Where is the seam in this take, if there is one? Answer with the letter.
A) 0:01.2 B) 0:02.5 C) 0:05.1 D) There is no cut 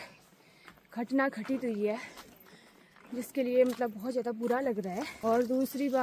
C